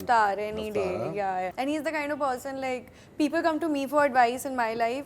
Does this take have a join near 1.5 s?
yes; 1 cut; at 1.5 s

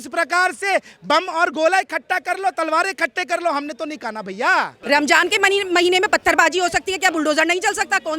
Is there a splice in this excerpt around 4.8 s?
yes; 1 cut; at 4.8 s

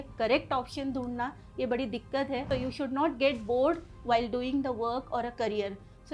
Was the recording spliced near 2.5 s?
yes; 1 cut; at 2.5 s

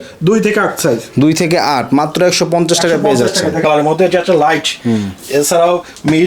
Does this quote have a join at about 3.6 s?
yes; 1 cut; at 3.6 s

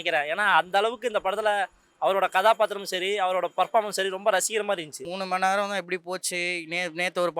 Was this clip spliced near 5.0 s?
yes; 1 cut; at 5.0 s

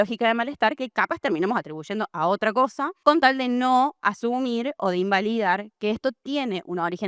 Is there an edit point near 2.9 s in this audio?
no; 0 cuts

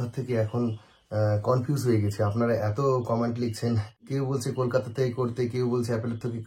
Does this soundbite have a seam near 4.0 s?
yes; 1 cut; at 4.0 s

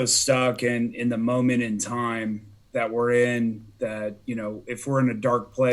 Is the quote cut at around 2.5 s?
yes; 1 cut; at 2.5 s

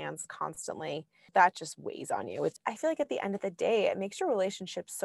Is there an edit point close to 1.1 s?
yes; 2 cuts; at 1.1 s, 2.6 s

